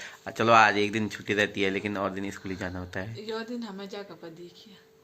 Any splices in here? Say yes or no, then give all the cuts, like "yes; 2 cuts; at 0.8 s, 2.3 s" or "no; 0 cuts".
no; 0 cuts